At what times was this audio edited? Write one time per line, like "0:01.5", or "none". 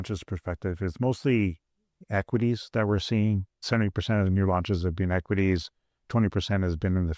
0:03.6